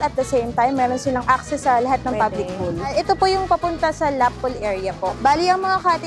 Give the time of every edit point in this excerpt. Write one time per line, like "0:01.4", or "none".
0:02.9
0:05.2